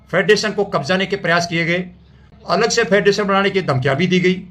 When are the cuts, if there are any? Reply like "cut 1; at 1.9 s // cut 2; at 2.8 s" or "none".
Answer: cut 1; at 2.3 s